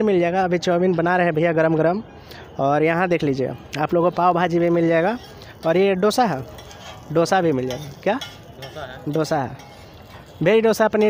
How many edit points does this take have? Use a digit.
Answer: 0